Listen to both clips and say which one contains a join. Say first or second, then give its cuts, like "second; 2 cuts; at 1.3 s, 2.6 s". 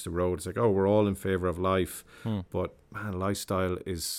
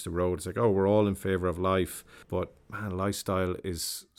second; 1 cut; at 2.2 s